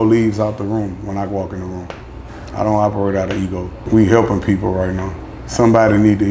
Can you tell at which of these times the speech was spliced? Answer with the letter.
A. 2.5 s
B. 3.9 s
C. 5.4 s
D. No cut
B